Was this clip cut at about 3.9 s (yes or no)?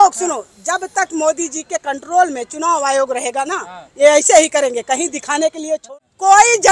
no